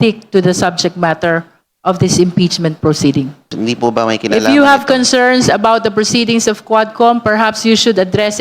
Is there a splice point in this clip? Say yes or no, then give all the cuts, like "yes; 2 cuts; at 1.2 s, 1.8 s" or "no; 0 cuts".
yes; 1 cut; at 3.5 s